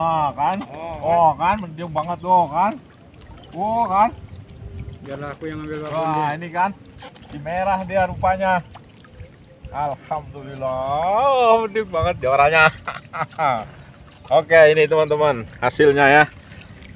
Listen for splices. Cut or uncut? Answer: uncut